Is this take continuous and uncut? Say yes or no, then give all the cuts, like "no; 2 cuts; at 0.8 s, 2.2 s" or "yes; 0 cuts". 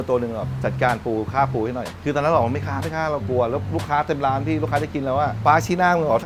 yes; 0 cuts